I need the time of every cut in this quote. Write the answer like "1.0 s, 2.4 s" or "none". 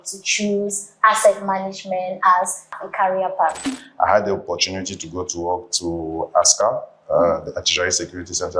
2.8 s, 3.6 s